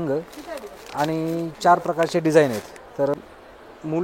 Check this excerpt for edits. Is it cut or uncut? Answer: cut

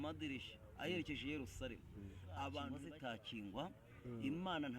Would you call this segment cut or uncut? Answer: cut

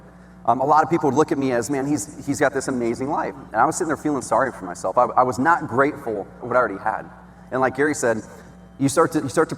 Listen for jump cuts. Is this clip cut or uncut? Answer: cut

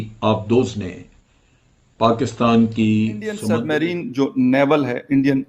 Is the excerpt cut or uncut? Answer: cut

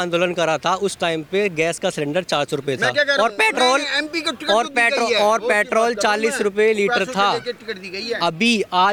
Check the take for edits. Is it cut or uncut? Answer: uncut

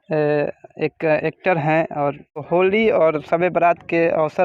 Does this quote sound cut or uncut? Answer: cut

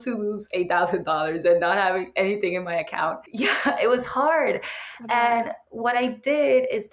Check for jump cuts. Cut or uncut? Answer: cut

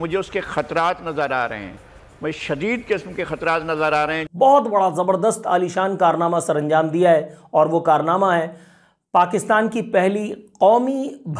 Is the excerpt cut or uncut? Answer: cut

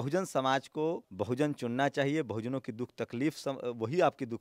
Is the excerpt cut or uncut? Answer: cut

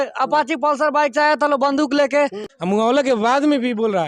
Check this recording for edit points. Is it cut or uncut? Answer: cut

